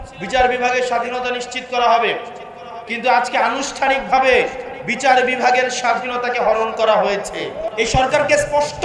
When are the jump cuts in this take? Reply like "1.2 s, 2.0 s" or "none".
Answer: 7.6 s